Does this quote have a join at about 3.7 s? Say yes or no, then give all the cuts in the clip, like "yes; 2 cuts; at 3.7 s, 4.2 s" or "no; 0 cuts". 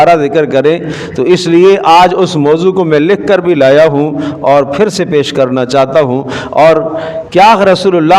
no; 1 cut; at 7.1 s